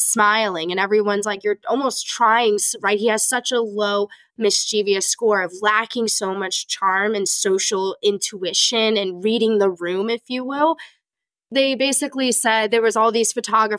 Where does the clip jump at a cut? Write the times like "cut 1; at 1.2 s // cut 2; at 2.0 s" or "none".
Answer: cut 1; at 11.2 s